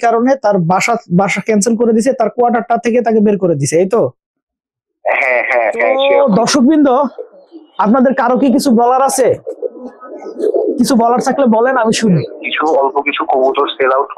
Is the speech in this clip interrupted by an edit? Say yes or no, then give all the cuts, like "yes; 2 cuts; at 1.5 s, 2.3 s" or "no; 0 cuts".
yes; 2 cuts; at 6.0 s, 12.4 s